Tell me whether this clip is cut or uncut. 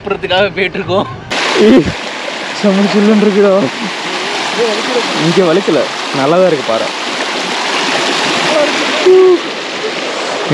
cut